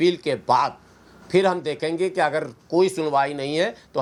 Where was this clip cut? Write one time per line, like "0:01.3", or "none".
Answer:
none